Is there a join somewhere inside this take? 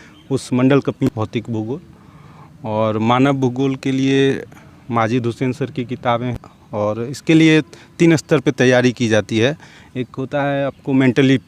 yes; 2 cuts; at 1.1 s, 6.4 s

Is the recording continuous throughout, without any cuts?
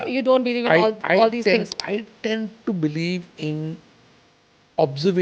yes; 0 cuts

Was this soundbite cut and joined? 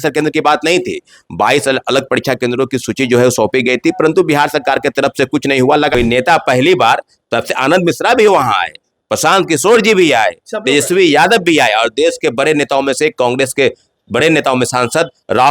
yes; 1 cut; at 5.9 s

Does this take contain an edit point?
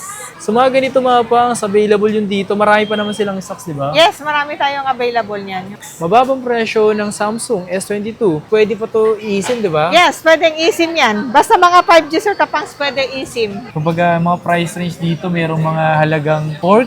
yes; 2 cuts; at 5.8 s, 13.7 s

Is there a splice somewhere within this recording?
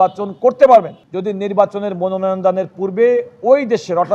yes; 1 cut; at 1.0 s

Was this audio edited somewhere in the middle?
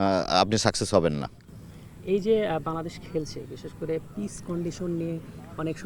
no; 0 cuts

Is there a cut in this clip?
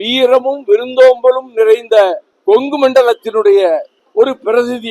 yes; 2 cuts; at 2.3 s, 4.0 s

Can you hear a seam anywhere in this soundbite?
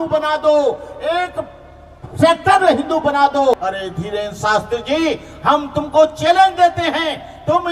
yes; 1 cut; at 3.6 s

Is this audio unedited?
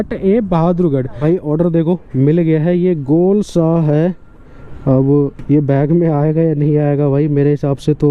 no; 1 cut; at 1.1 s

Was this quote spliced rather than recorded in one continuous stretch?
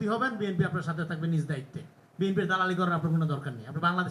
no; 0 cuts

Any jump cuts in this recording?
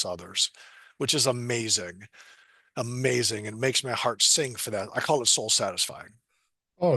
no; 0 cuts

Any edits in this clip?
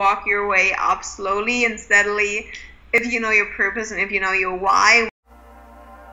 yes; 1 cut; at 5.1 s

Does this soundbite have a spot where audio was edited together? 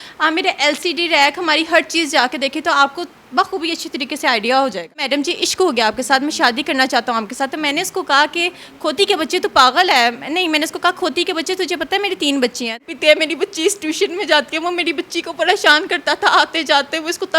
yes; 2 cuts; at 5.0 s, 12.7 s

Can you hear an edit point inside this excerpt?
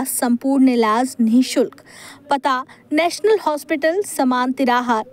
no; 0 cuts

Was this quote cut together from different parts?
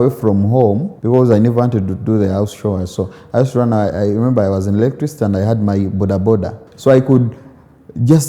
yes; 2 cuts; at 0.9 s, 6.7 s

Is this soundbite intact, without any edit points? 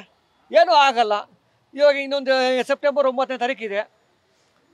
yes; 0 cuts

